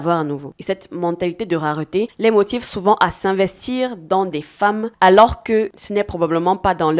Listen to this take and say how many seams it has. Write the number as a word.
zero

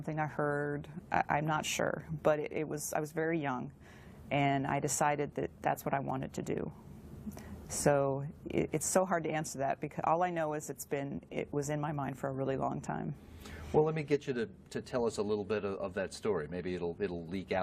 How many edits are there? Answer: one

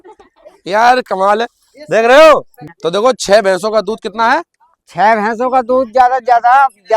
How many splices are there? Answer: one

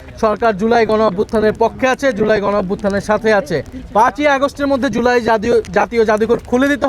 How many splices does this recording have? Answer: one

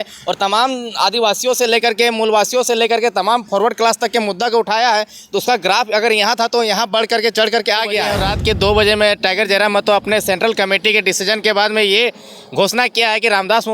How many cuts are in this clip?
one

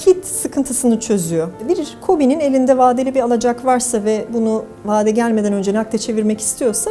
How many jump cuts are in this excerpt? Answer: one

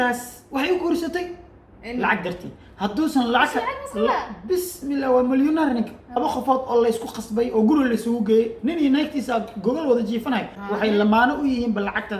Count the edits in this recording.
two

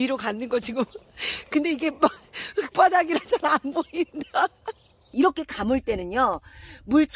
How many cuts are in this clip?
one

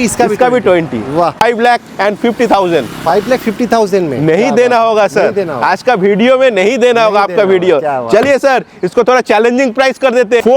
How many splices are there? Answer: one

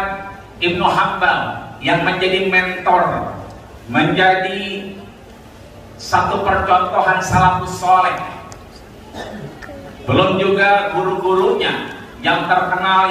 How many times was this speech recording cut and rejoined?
zero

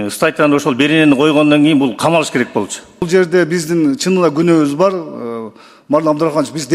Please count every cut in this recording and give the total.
one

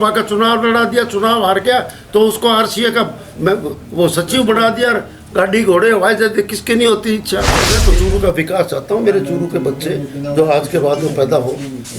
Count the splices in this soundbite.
one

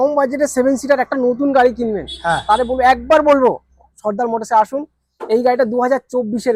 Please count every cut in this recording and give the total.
zero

